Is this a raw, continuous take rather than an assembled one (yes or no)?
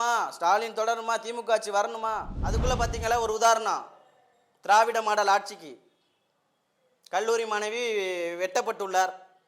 no